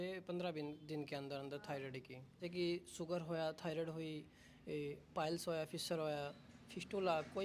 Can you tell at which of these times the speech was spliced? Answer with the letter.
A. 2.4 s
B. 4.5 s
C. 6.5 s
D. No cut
A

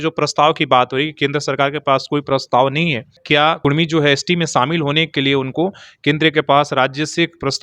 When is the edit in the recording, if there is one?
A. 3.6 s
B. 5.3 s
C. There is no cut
A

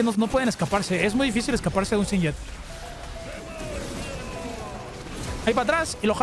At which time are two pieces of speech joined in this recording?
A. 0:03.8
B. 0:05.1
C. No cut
C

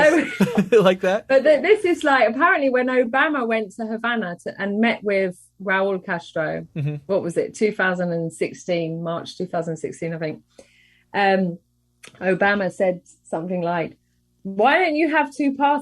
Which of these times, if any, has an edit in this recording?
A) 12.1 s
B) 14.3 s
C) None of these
B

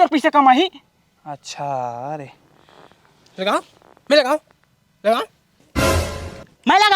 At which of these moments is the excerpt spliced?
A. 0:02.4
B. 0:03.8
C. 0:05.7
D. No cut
D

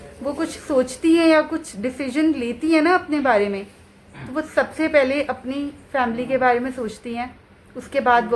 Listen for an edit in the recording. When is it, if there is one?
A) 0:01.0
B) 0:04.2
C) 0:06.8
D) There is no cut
D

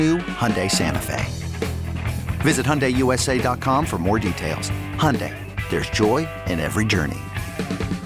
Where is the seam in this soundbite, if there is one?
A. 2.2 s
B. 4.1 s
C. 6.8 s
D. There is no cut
D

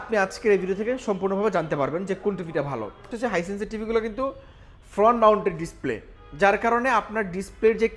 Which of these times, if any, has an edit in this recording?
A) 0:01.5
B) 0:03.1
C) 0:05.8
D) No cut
B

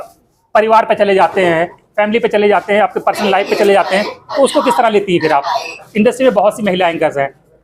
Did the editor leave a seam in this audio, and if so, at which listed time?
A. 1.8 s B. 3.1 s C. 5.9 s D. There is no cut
C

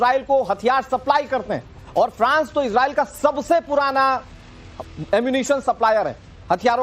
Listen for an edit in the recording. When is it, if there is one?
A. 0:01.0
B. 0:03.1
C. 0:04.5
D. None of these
A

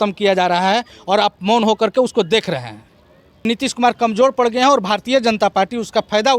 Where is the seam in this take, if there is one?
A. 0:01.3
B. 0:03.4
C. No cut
B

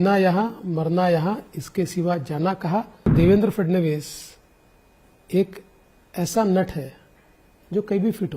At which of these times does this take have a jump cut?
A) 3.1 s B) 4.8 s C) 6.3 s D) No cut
A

